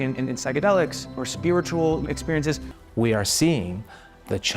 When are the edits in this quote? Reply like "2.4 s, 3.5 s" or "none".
2.7 s